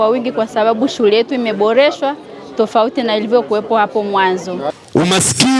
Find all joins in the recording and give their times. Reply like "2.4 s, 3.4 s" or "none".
4.7 s